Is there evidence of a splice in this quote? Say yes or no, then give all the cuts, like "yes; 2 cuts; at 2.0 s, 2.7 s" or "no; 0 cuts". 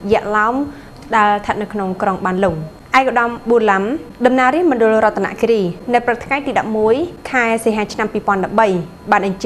yes; 4 cuts; at 2.7 s, 4.0 s, 5.8 s, 7.2 s